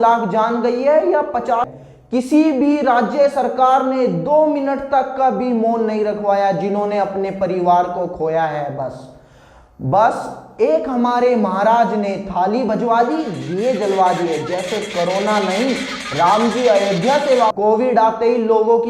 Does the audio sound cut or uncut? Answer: cut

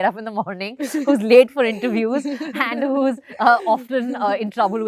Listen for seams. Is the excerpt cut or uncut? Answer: uncut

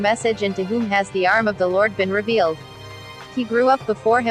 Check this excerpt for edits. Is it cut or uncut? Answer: cut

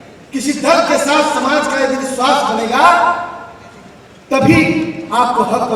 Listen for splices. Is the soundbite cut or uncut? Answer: uncut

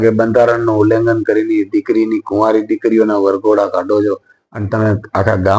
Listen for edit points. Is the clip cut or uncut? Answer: uncut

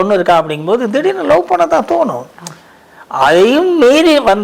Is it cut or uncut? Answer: uncut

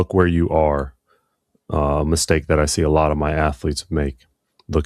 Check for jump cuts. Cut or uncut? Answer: uncut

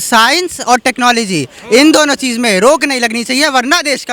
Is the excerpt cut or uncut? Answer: uncut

